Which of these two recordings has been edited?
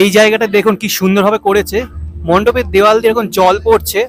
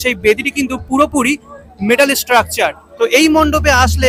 second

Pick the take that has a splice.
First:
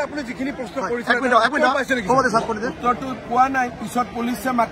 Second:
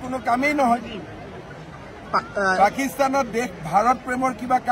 second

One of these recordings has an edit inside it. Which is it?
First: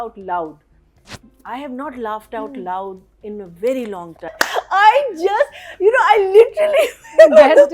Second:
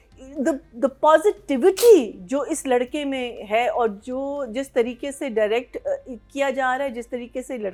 first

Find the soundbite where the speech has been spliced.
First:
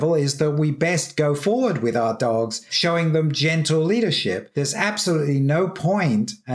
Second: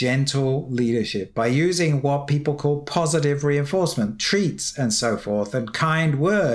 first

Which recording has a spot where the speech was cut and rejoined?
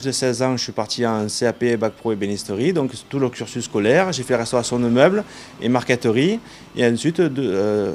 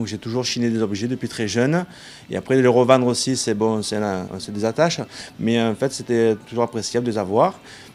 second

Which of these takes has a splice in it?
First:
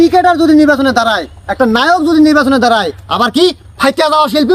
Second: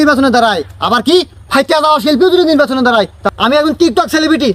second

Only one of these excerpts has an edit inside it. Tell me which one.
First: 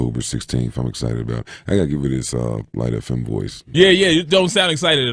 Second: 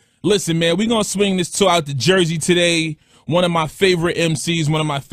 first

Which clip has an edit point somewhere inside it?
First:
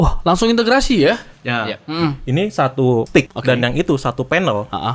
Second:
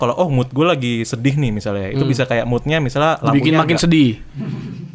first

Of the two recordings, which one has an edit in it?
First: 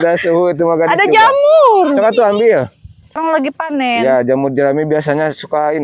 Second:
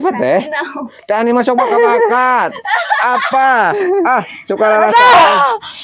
first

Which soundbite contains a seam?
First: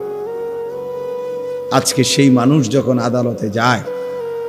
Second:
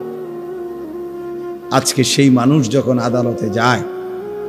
first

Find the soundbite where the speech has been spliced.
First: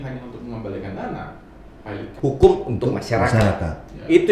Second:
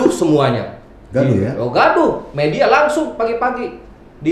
first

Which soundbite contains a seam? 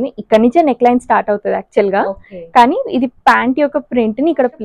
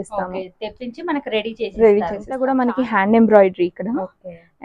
second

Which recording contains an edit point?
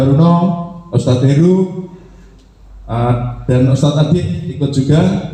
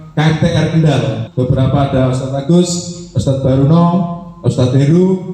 second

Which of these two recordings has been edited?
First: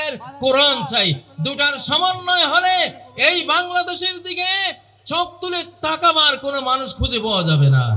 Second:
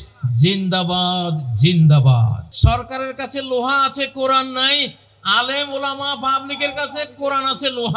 second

